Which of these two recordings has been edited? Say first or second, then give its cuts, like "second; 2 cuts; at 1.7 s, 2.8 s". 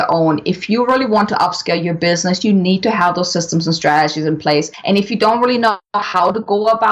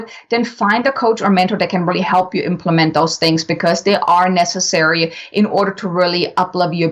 first; 1 cut; at 4.7 s